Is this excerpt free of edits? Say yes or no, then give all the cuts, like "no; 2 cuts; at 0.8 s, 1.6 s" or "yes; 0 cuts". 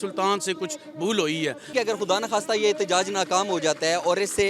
no; 1 cut; at 1.6 s